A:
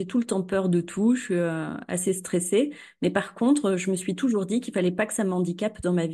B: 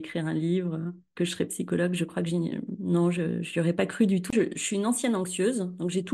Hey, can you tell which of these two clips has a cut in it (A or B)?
B